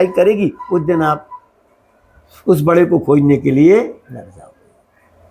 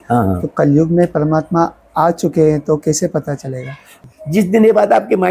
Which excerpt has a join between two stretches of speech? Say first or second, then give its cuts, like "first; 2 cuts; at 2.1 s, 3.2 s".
second; 1 cut; at 4.0 s